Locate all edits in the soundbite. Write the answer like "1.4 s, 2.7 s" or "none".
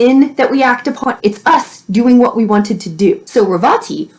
1.0 s, 3.2 s